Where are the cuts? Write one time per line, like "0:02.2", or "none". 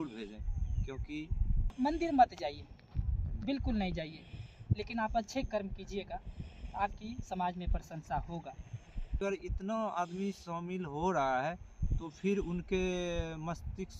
0:01.8
0:09.2